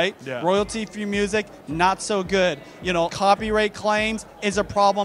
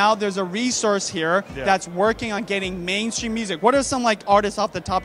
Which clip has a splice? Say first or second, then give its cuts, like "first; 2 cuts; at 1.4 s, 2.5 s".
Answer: first; 1 cut; at 3.1 s